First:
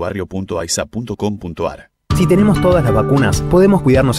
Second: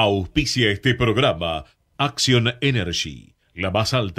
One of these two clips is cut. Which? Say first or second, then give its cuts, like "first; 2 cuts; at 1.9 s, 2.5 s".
first; 1 cut; at 1.9 s